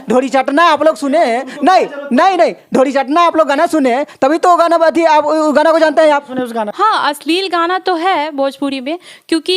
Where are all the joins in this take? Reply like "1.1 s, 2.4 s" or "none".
6.7 s